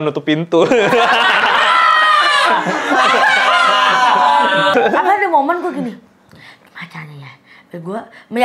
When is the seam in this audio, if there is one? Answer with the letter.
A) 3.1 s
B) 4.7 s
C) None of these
B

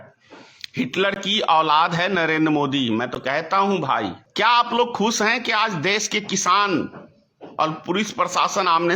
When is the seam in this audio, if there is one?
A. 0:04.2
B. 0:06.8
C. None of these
A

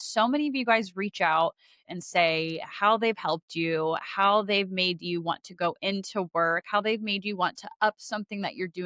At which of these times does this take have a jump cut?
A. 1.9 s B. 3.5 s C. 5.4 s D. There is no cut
A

